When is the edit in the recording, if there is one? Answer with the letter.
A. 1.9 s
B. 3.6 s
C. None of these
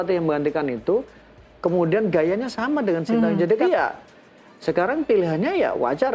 B